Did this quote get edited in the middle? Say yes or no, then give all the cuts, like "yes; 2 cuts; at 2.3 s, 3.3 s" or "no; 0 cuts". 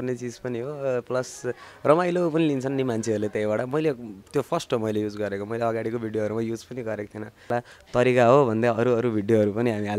yes; 1 cut; at 7.5 s